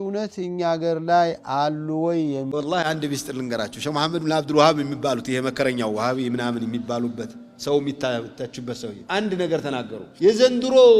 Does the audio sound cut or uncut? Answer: cut